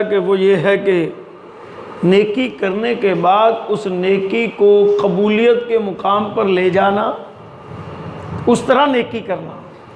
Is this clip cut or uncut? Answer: uncut